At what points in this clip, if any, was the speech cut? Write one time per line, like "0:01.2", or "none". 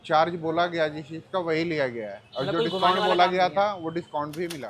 none